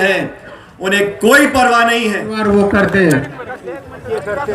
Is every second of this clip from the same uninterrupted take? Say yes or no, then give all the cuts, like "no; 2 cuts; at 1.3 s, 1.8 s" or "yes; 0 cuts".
no; 1 cut; at 2.4 s